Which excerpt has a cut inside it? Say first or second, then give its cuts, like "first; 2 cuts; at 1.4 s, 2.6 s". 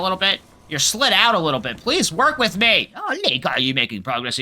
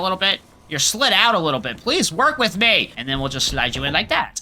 first; 1 cut; at 3.0 s